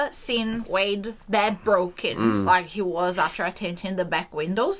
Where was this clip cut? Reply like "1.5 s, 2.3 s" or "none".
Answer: none